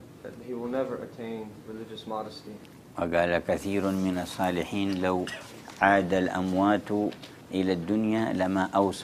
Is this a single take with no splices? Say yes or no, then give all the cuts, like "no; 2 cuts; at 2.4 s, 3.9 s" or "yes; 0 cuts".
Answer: no; 1 cut; at 7.3 s